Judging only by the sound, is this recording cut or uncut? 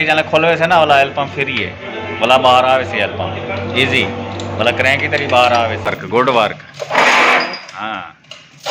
cut